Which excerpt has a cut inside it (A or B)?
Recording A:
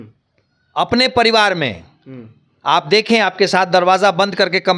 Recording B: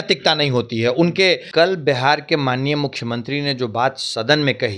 B